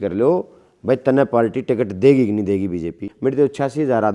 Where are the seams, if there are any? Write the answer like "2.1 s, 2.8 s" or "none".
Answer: 3.1 s